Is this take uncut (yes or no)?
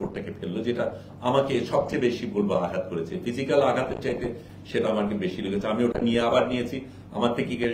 yes